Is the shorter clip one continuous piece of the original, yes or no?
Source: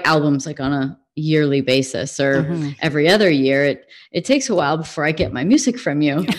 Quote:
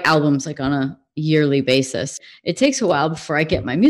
no